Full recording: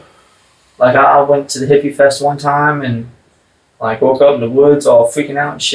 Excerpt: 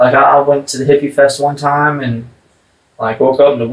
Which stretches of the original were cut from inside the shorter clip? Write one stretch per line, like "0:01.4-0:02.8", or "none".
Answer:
none